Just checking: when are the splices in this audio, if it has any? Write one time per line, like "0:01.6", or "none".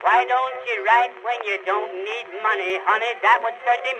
0:02.7